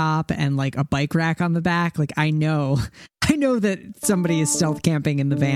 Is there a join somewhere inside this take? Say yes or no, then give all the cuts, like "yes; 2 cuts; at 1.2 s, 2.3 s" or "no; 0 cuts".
no; 0 cuts